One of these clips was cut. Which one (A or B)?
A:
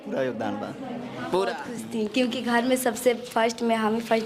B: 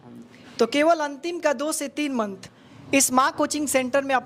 A